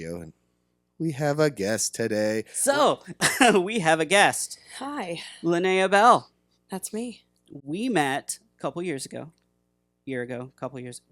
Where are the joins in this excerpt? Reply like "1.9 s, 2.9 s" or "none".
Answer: 2.5 s